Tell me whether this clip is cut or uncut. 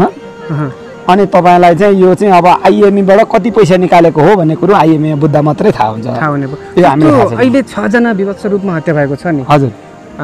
uncut